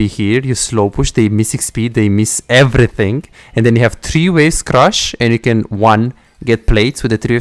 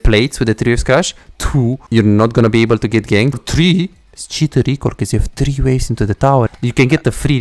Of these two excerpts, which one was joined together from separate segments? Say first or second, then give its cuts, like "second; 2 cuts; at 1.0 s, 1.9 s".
second; 3 cuts; at 1.8 s, 3.4 s, 6.5 s